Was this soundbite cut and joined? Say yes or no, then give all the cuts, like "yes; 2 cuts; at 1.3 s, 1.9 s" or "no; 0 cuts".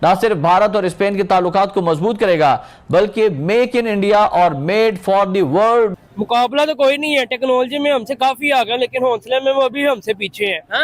yes; 1 cut; at 6.0 s